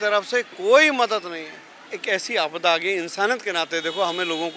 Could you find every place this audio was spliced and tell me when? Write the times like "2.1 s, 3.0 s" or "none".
1.9 s

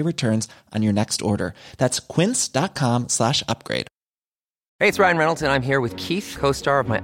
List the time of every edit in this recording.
4.6 s

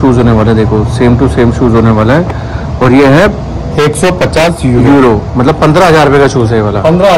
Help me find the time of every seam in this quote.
none

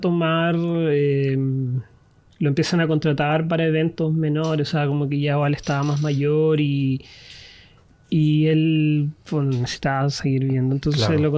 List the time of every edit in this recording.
none

